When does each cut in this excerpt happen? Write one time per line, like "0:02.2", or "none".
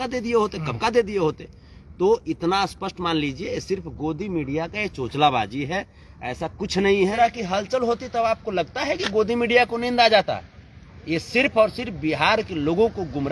0:07.2

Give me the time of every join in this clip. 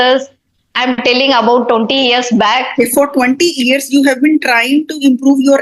0:02.7

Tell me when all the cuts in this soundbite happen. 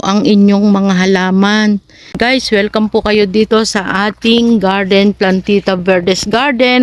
0:02.2

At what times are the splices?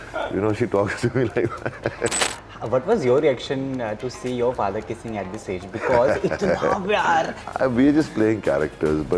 0:02.2
0:07.4

